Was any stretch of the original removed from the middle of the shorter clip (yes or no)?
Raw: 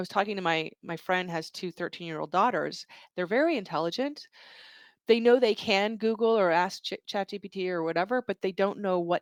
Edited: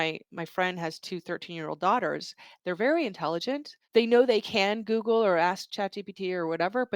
yes